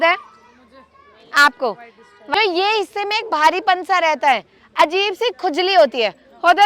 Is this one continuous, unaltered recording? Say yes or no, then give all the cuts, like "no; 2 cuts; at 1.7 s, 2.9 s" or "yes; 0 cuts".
no; 1 cut; at 2.3 s